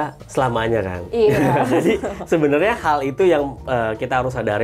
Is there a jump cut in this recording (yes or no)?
no